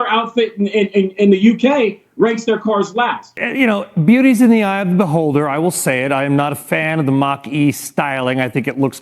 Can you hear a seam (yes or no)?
yes